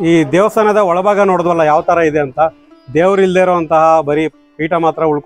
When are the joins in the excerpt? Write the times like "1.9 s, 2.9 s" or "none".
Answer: none